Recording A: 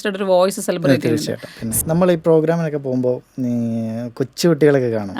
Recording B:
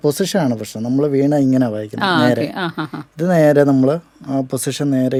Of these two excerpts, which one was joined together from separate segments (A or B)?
A